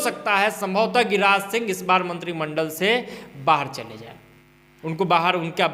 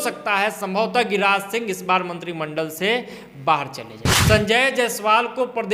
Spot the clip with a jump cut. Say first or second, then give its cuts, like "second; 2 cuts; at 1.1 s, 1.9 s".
second; 1 cut; at 4.2 s